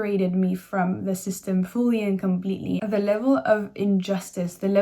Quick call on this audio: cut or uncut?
cut